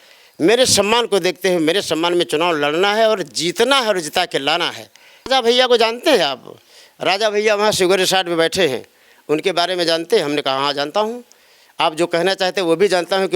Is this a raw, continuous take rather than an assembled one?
no; 1 cut; at 5.3 s

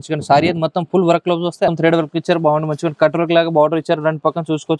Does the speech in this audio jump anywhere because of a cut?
yes; 1 cut; at 1.7 s

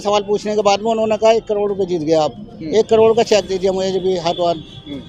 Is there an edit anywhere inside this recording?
no; 0 cuts

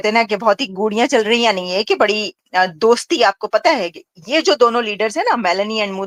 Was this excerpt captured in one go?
yes; 0 cuts

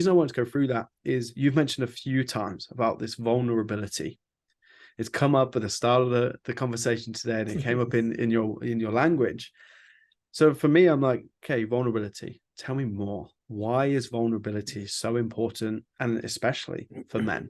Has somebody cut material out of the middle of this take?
yes; 1 cut; at 15.9 s

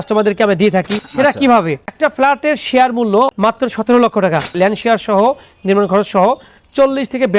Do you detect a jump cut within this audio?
yes; 3 cuts; at 1.0 s, 1.9 s, 4.5 s

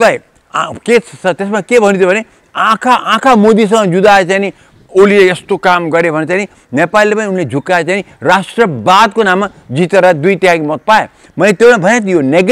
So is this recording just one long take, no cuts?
yes; 0 cuts

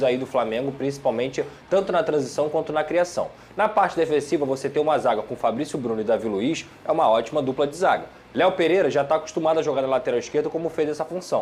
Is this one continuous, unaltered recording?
yes; 0 cuts

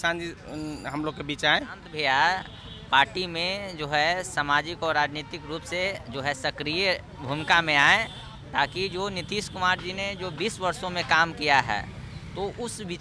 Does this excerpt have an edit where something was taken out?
yes; 1 cut; at 1.9 s

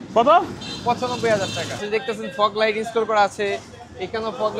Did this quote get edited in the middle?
yes; 1 cut; at 1.8 s

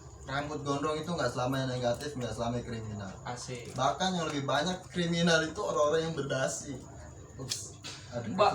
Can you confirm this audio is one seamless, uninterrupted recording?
yes; 0 cuts

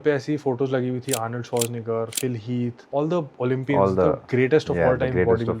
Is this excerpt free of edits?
no; 1 cut; at 2.8 s

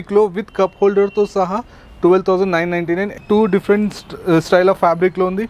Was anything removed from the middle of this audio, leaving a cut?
yes; 1 cut; at 3.1 s

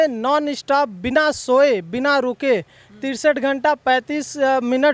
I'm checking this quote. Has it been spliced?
no; 0 cuts

